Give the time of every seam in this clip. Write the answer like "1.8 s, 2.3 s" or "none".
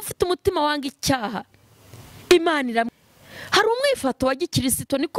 2.9 s